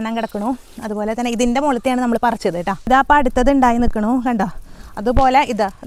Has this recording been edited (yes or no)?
no